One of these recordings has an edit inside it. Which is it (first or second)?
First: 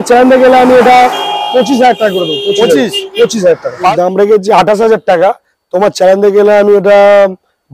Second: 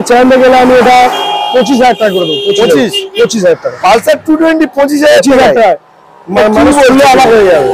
first